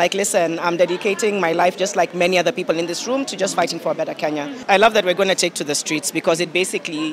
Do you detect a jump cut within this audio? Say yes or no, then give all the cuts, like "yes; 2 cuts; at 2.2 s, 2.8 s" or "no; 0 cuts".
yes; 1 cut; at 4.6 s